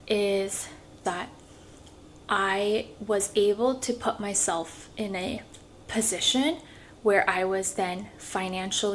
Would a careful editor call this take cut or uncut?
uncut